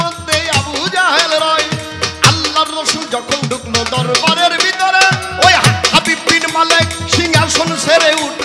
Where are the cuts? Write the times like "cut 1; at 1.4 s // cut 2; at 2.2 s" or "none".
none